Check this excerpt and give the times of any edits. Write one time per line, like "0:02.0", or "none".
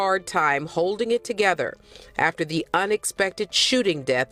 none